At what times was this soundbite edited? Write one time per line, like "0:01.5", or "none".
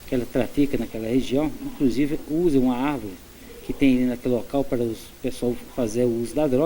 0:05.7